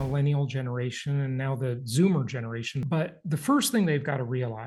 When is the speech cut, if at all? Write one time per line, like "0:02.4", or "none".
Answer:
0:02.7